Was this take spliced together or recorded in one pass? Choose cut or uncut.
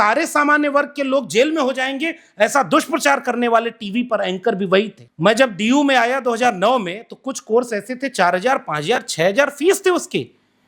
cut